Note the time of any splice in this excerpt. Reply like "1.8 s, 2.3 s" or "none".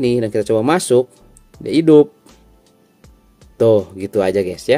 none